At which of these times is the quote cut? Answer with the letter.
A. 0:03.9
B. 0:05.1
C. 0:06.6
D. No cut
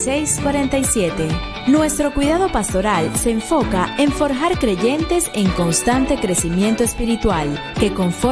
D